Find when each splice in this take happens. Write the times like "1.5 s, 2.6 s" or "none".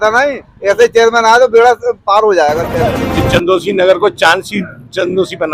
3.1 s